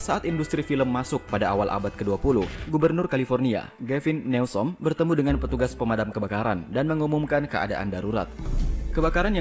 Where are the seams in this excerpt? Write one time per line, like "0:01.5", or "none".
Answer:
0:02.6